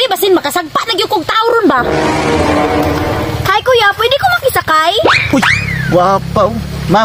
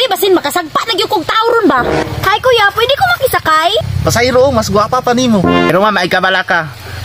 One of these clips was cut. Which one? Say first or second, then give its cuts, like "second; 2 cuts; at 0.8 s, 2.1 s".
second; 3 cuts; at 2.0 s, 3.8 s, 5.7 s